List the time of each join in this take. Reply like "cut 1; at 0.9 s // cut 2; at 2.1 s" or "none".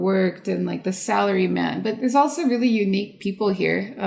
cut 1; at 1.9 s